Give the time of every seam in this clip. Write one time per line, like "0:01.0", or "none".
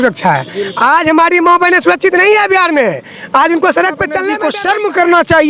0:04.4